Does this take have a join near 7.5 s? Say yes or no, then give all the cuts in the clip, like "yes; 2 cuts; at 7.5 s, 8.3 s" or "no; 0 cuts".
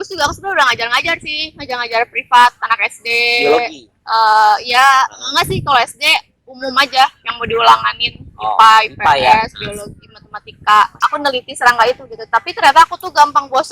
no; 1 cut; at 11.0 s